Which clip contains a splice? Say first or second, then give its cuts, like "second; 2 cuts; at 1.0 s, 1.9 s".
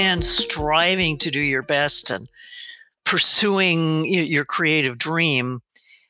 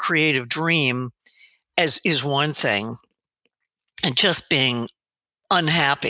first; 1 cut; at 3.0 s